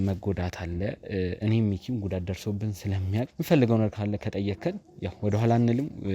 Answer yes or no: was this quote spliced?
yes